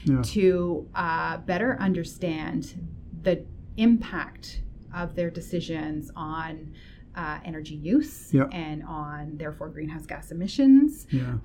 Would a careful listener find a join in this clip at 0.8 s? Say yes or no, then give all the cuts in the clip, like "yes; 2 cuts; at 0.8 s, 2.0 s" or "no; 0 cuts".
no; 0 cuts